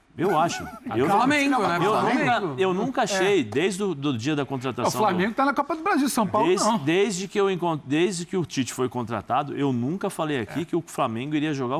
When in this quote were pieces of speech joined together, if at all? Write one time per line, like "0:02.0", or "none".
none

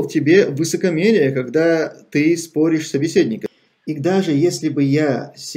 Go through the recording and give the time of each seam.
0:03.4

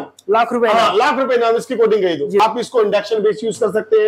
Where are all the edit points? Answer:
0:02.4

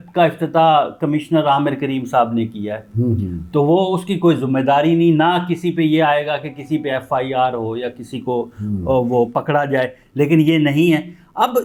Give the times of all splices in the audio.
none

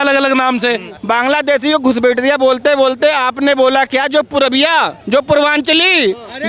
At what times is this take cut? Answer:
0:00.9
0:05.0

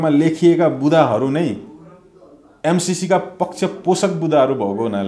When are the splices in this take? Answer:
none

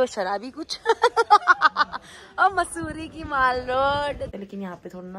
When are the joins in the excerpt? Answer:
0:04.3

